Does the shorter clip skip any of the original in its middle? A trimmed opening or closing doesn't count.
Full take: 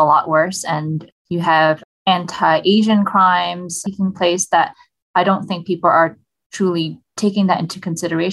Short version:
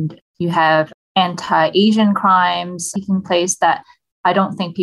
no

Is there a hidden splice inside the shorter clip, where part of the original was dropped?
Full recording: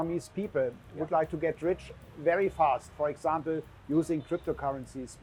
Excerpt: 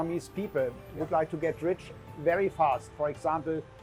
no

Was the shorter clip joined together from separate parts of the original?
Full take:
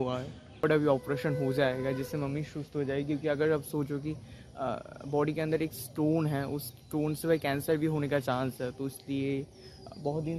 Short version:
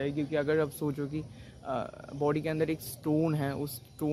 no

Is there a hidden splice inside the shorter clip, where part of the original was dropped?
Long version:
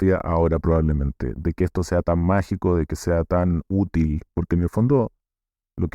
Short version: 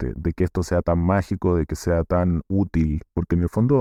no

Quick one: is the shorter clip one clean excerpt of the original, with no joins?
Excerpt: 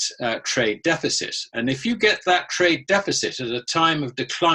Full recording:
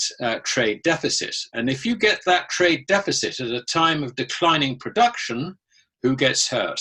yes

